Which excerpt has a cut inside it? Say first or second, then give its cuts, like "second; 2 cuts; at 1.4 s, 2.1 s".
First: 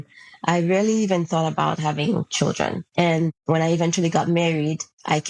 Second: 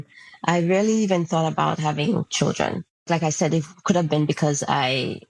first; 1 cut; at 2.8 s